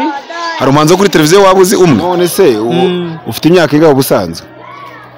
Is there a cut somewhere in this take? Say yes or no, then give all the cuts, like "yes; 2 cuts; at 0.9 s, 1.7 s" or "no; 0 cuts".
yes; 1 cut; at 2.1 s